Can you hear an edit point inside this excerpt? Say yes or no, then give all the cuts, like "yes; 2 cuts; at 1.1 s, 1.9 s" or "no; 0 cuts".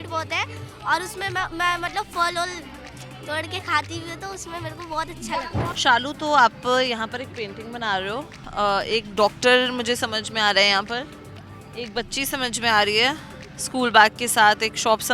yes; 1 cut; at 5.7 s